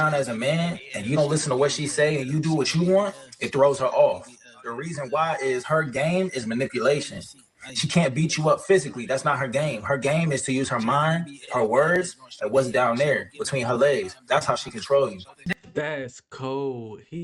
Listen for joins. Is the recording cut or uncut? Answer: cut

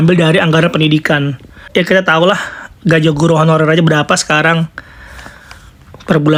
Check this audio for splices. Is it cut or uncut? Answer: uncut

